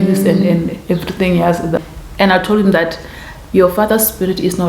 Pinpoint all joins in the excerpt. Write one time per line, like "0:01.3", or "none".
0:01.8